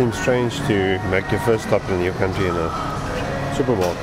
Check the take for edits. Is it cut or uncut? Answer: uncut